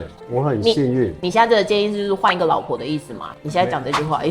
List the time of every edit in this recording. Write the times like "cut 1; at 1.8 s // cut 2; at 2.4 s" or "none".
none